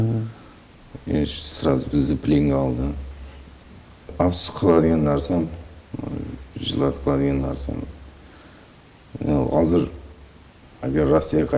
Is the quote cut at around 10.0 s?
no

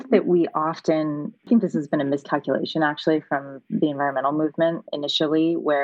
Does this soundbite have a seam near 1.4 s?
yes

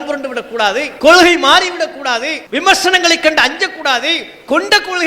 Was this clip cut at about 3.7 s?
no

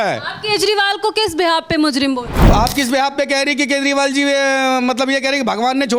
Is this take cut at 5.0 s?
no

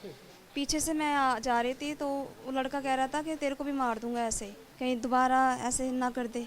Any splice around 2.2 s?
no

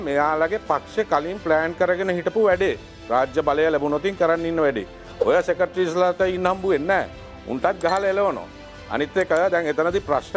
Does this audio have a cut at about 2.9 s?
no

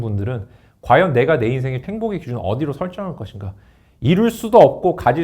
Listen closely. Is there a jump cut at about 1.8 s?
yes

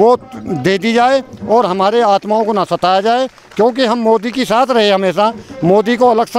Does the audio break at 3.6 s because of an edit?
no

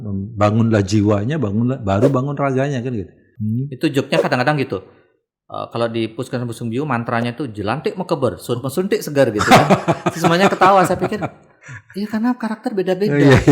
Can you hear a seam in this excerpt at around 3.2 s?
yes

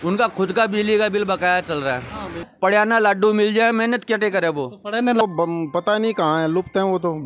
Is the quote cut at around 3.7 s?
no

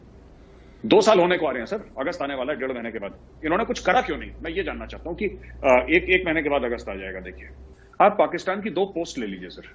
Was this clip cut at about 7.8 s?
yes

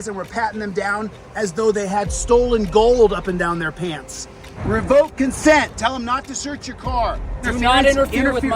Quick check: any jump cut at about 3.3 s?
no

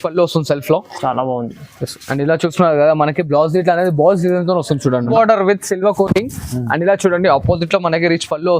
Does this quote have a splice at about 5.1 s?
yes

